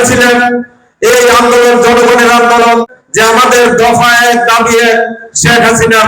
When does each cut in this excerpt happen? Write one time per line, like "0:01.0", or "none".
0:03.0